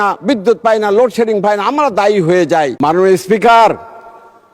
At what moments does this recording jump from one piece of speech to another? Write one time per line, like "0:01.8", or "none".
0:02.7